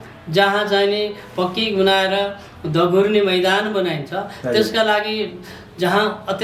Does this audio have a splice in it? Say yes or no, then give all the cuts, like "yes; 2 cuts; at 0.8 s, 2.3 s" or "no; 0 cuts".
no; 0 cuts